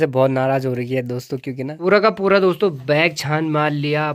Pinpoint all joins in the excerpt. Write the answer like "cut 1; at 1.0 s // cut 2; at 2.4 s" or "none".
cut 1; at 1.8 s